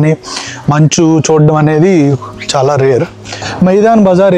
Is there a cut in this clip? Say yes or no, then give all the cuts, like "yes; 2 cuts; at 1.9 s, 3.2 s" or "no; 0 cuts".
yes; 1 cut; at 3.4 s